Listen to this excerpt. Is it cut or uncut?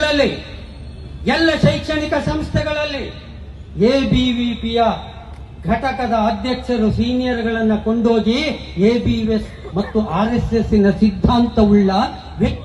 uncut